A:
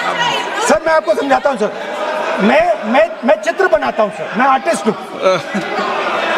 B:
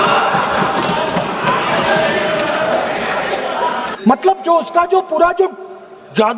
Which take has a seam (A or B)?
B